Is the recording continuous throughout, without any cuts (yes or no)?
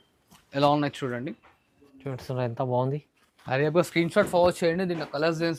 yes